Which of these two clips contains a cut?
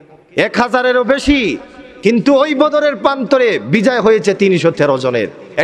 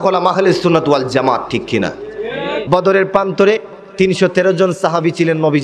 second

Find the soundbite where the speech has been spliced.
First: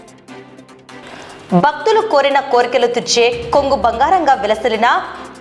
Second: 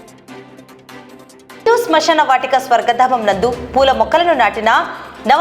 second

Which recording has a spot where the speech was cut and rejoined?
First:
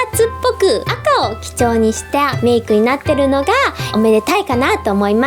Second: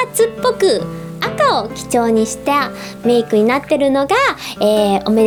first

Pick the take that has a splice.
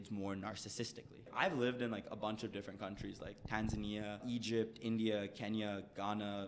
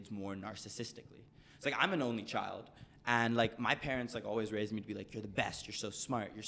first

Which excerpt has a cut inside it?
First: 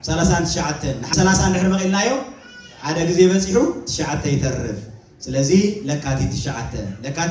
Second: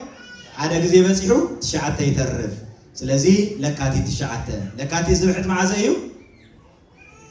first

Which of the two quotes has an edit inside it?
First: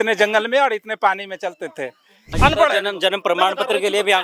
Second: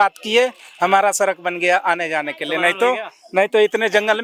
first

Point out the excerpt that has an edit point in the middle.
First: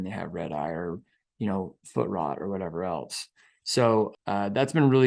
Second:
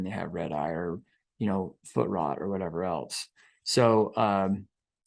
first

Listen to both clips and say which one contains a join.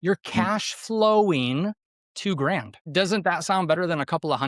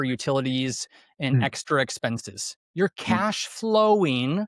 first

